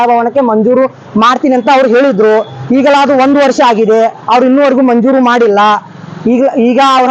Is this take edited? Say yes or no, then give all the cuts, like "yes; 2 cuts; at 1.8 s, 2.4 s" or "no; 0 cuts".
no; 0 cuts